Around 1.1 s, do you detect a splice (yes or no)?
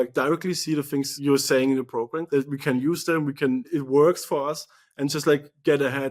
yes